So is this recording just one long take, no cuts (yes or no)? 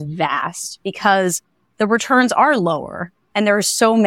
yes